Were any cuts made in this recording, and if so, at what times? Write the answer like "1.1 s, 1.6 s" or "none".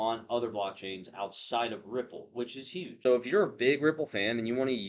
2.9 s